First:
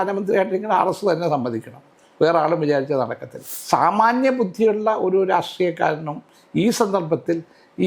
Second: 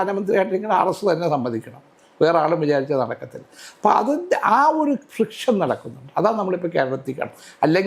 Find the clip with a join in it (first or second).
first